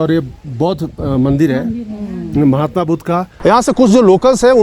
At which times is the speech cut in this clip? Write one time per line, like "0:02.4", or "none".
0:03.3